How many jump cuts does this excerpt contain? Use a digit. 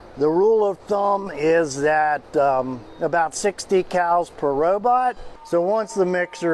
1